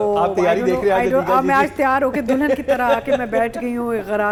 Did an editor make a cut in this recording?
no; 0 cuts

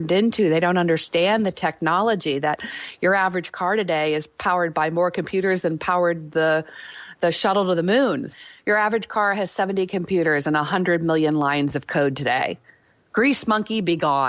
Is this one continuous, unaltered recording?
no; 1 cut; at 8.3 s

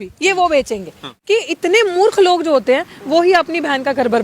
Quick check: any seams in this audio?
yes; 1 cut; at 1.1 s

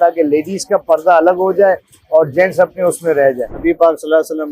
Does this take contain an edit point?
yes; 1 cut; at 3.5 s

